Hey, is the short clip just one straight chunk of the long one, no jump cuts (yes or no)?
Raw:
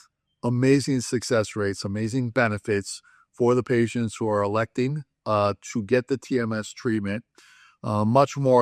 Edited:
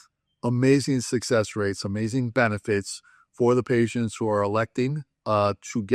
yes